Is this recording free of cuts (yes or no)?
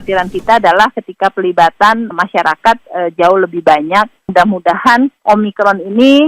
no